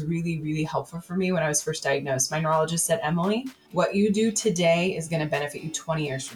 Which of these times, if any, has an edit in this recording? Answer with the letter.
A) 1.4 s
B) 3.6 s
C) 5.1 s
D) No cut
B